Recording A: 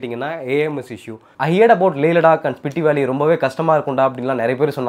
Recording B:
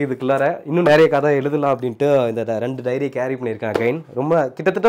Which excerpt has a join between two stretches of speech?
A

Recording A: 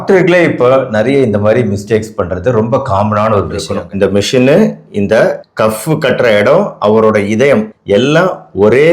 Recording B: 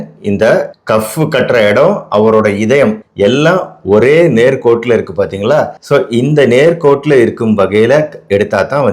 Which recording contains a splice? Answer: A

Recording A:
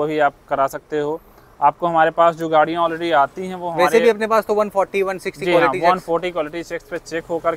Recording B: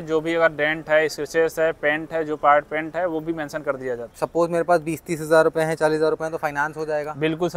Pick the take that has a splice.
B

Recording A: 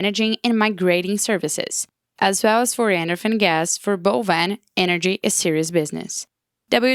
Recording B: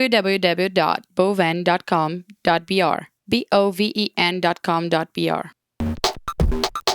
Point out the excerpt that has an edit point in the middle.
B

